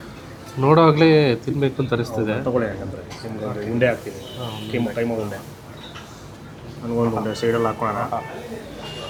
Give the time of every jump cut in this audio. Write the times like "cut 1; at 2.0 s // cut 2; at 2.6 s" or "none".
none